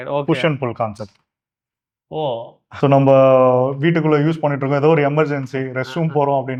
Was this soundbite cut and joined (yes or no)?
no